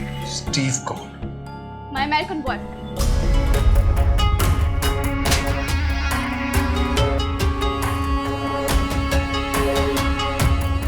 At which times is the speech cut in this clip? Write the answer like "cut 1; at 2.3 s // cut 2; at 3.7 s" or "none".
none